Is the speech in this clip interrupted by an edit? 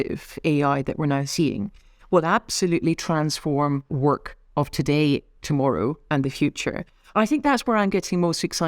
yes; 1 cut; at 3.9 s

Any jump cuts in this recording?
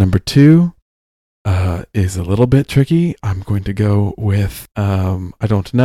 yes; 1 cut; at 4.6 s

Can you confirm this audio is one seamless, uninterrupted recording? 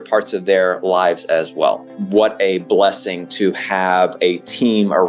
no; 1 cut; at 1.9 s

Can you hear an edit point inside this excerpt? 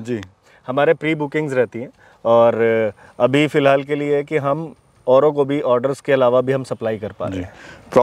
no; 0 cuts

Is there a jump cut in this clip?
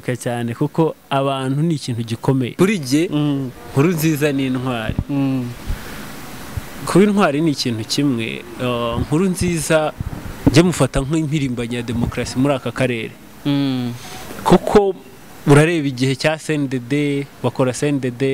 yes; 1 cut; at 2.6 s

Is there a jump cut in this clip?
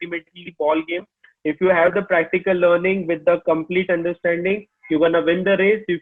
no; 0 cuts

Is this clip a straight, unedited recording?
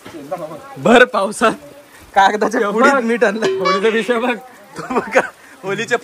yes; 0 cuts

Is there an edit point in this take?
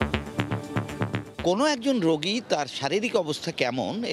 yes; 1 cut; at 1.3 s

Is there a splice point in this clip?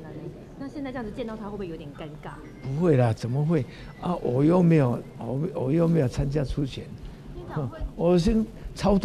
no; 0 cuts

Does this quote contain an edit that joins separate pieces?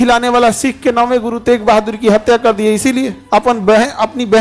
yes; 1 cut; at 3.2 s

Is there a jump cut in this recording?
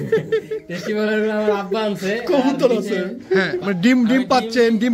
yes; 1 cut; at 3.5 s

